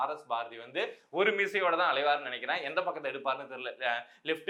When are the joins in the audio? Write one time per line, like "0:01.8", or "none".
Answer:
none